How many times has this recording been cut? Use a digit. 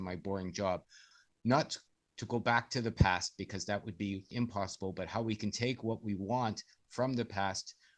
2